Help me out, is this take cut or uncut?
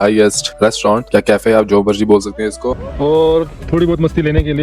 cut